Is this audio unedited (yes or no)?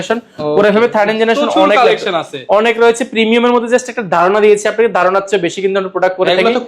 yes